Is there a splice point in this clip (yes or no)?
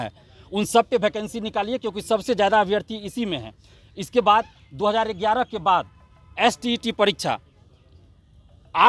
no